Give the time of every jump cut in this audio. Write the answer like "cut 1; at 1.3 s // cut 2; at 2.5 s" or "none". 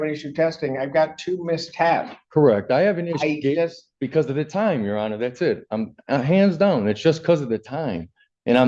none

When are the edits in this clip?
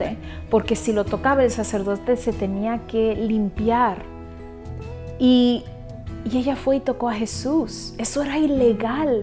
none

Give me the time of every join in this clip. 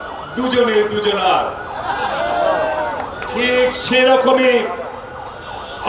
none

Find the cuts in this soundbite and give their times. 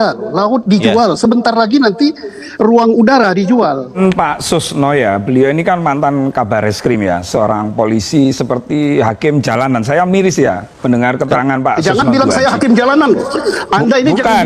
cut 1; at 3.9 s

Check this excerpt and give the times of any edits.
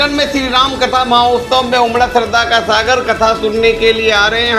none

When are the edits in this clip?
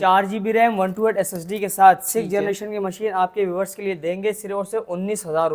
none

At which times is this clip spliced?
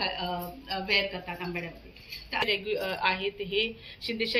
cut 1; at 2.4 s

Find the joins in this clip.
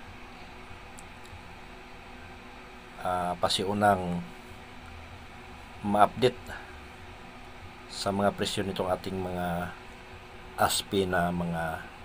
none

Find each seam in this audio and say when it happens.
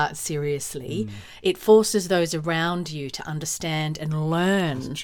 none

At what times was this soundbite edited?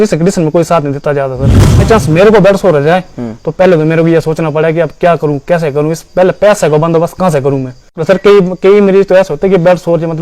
cut 1; at 1.9 s // cut 2; at 8.0 s

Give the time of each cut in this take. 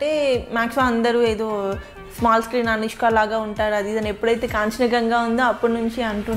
none

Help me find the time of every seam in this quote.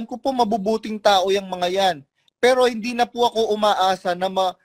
none

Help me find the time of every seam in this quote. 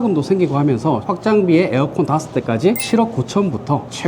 cut 1; at 1.0 s // cut 2; at 2.8 s

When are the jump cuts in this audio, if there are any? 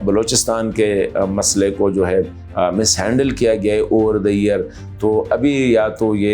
none

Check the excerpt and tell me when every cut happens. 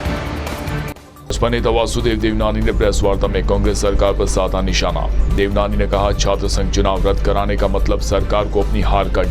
cut 1; at 1.1 s

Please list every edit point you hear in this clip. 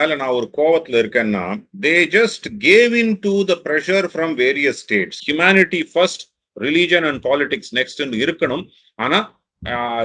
cut 1; at 5.2 s

